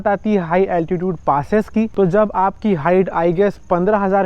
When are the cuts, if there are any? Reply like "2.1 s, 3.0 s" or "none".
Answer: none